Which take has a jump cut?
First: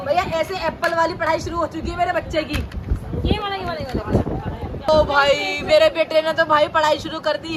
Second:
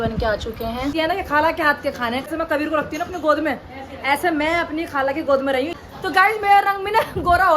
second; 3 cuts; at 0.9 s, 2.3 s, 5.7 s

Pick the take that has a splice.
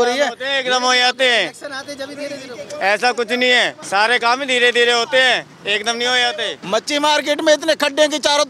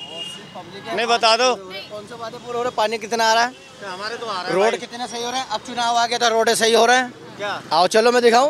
first; 2 cuts; at 3.8 s, 6.6 s

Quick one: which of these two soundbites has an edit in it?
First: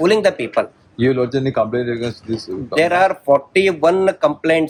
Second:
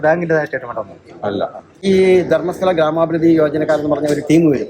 second; 1 cut; at 1.7 s

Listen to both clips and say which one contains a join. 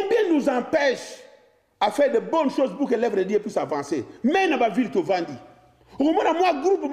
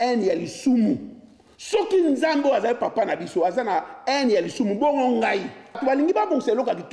second; 1 cut; at 5.8 s

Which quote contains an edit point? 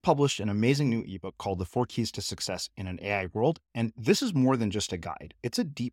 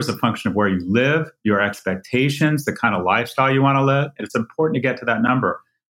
second; 1 cut; at 4.1 s

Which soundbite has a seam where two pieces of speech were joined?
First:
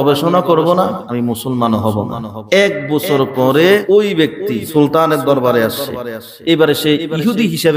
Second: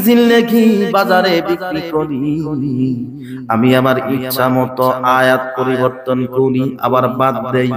first; 3 cuts; at 1.0 s, 2.3 s, 4.0 s

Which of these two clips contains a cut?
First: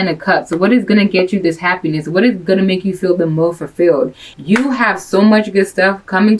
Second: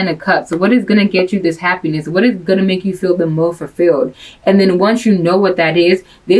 first; 1 cut; at 4.2 s

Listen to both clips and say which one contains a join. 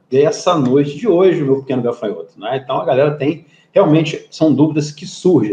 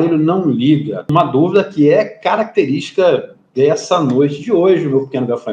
second; 1 cut; at 1.1 s

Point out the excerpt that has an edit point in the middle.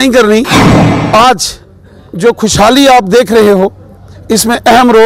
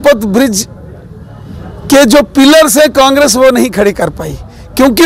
first; 1 cut; at 0.9 s

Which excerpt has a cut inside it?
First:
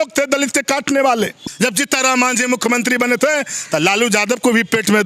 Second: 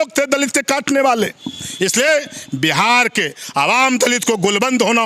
first; 1 cut; at 1.4 s

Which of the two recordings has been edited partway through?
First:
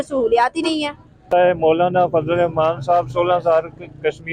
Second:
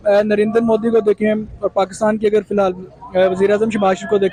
first; 1 cut; at 1.3 s

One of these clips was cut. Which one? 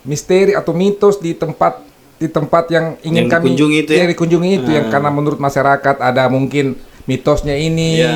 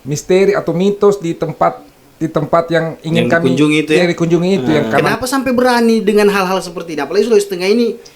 second; 1 cut; at 5.0 s

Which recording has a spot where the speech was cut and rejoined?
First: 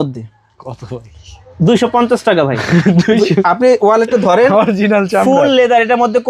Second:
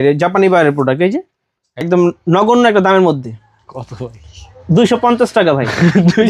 second; 1 cut; at 1.8 s

